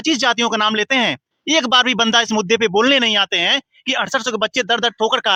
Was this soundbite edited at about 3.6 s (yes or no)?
no